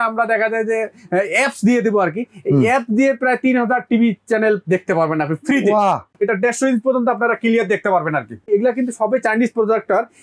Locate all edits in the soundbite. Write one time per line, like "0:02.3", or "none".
0:06.1
0:08.4